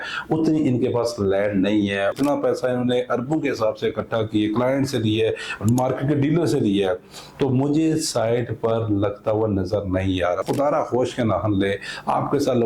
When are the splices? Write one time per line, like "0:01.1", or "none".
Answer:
0:02.1
0:10.4